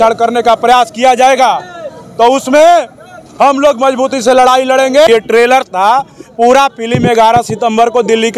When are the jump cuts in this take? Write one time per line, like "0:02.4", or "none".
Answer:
0:05.1